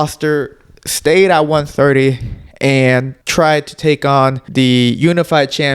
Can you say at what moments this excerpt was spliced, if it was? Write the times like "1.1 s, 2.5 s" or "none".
3.2 s, 4.4 s